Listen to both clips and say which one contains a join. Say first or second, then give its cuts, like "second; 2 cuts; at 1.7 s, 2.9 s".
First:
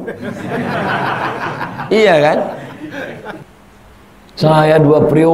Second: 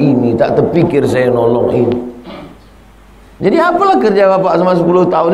first; 1 cut; at 3.4 s